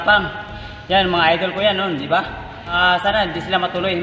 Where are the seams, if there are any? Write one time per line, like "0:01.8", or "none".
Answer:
0:02.8